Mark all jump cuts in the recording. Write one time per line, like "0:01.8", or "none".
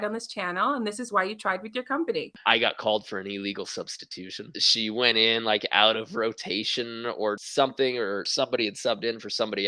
0:02.3